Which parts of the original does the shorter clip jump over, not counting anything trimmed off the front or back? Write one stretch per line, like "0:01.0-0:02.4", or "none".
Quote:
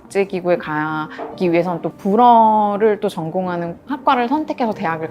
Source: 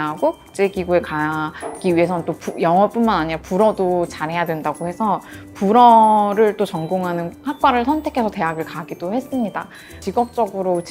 0:02.4-0:05.5